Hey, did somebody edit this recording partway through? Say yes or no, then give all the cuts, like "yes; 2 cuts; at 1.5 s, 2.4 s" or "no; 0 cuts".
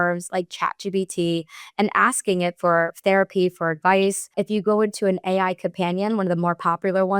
yes; 1 cut; at 4.3 s